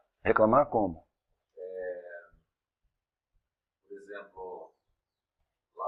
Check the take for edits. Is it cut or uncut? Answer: uncut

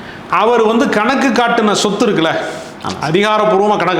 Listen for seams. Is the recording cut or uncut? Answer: uncut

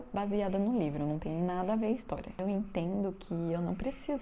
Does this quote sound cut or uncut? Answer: cut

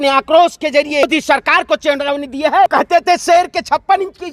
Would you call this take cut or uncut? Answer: cut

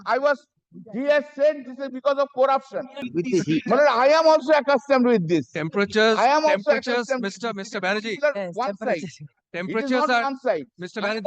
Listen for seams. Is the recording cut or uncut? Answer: cut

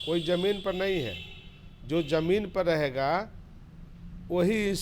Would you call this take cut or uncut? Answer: uncut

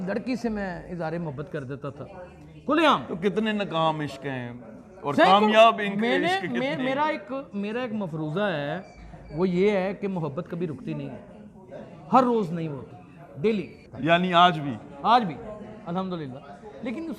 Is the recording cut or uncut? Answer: cut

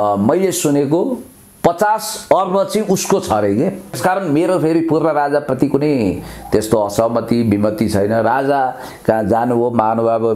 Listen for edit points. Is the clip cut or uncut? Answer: cut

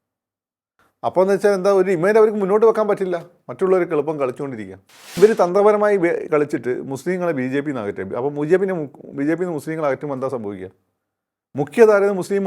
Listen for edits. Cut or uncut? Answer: cut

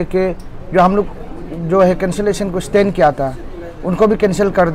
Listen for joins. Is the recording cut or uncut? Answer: uncut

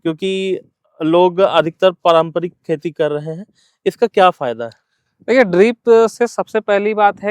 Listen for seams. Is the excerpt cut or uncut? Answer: uncut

